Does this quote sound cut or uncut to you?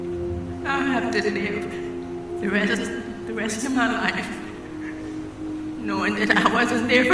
uncut